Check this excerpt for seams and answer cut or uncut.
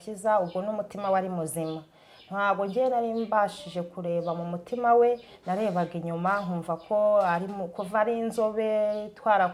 uncut